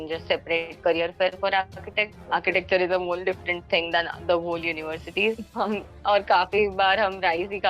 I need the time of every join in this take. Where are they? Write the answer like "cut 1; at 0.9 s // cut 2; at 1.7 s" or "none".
cut 1; at 2.2 s // cut 2; at 5.4 s